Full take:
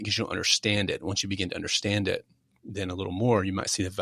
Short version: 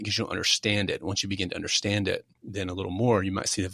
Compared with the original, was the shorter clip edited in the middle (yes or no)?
yes